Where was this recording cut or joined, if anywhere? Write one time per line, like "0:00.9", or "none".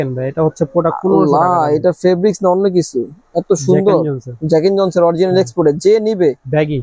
none